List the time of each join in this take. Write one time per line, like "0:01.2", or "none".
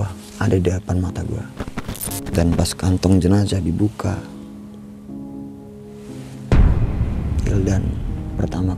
0:01.9